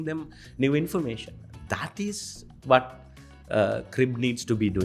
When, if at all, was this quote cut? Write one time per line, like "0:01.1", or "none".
none